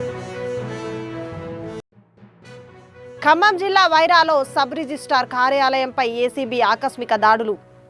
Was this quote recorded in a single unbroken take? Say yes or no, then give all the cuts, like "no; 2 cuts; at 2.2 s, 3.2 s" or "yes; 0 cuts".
no; 1 cut; at 1.7 s